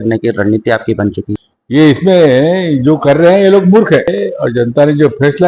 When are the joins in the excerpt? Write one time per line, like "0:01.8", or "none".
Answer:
0:01.3
0:04.1